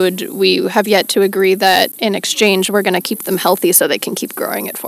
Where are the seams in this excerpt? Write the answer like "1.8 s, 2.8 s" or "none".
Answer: 1.9 s